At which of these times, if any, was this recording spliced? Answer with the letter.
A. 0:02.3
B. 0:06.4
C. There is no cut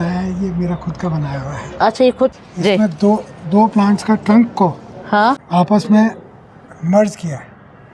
A